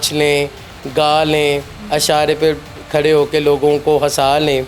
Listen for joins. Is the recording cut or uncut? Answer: uncut